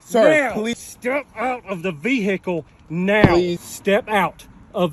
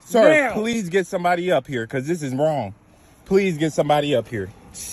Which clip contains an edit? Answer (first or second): first